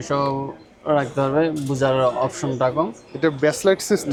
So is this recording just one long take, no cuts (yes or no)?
yes